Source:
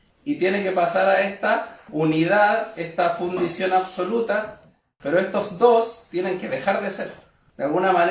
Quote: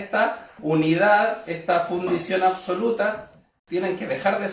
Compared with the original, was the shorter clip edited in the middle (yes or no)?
yes